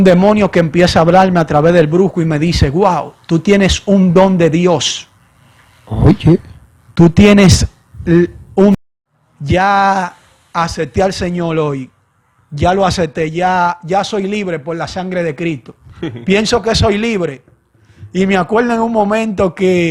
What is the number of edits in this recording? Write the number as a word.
one